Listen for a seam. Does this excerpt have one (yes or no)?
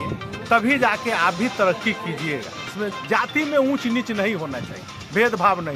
yes